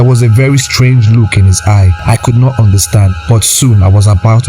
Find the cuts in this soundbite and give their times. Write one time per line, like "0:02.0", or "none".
0:01.9
0:03.2